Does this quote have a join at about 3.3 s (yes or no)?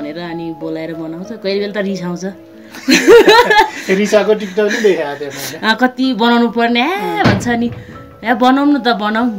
no